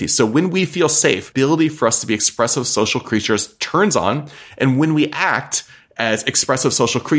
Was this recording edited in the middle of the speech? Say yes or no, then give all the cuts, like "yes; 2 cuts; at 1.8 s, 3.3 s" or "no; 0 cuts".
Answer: yes; 1 cut; at 1.3 s